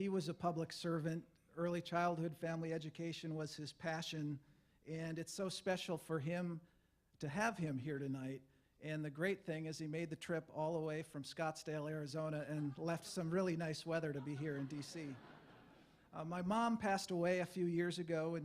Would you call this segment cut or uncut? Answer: cut